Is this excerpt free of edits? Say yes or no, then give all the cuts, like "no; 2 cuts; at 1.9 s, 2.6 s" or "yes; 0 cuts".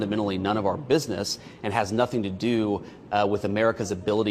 yes; 0 cuts